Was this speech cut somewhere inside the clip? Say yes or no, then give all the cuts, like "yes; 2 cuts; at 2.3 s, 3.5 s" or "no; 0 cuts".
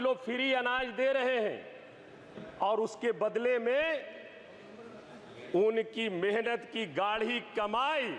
no; 0 cuts